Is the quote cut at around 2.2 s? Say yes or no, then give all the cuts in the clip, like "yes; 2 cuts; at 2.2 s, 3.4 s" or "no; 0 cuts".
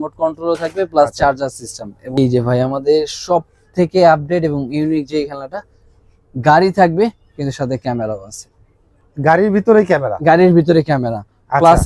yes; 1 cut; at 2.2 s